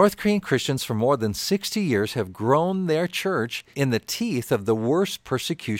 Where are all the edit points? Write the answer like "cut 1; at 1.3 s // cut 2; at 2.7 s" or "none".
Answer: cut 1; at 3.7 s